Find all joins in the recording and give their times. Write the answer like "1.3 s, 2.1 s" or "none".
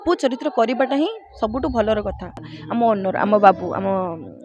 2.5 s